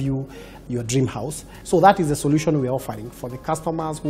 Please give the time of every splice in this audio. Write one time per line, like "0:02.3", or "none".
0:01.5